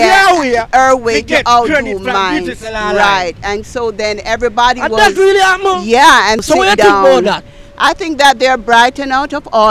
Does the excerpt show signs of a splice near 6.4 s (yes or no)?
yes